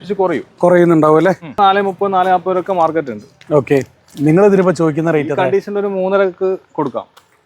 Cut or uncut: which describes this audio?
cut